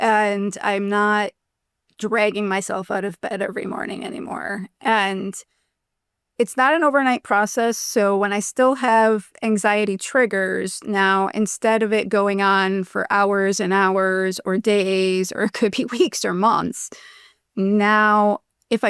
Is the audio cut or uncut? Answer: uncut